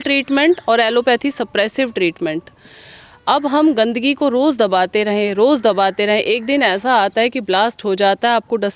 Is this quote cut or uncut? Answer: uncut